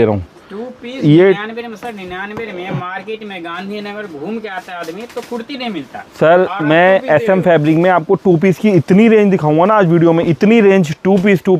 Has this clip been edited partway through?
no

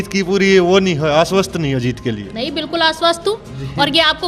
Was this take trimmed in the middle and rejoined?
no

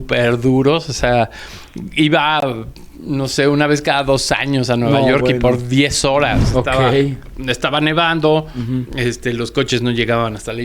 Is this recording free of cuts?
no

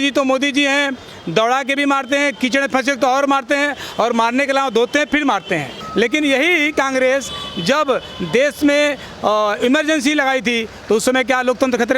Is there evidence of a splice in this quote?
yes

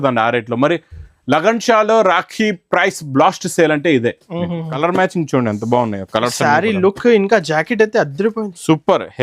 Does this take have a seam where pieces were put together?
yes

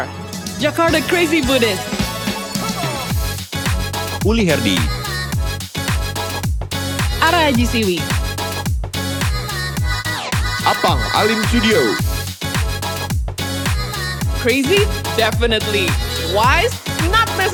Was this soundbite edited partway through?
no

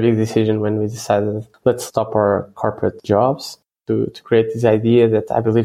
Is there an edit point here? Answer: yes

